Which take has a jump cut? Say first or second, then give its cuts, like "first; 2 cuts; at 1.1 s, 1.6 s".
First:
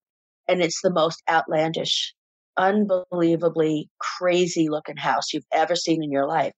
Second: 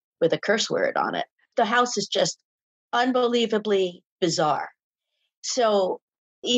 second; 1 cut; at 1.3 s